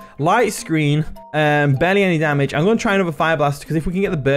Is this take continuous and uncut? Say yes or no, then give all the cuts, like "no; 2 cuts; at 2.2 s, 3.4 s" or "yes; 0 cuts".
no; 1 cut; at 1.2 s